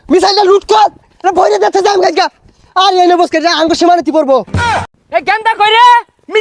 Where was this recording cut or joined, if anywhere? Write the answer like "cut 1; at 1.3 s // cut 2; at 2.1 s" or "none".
cut 1; at 4.8 s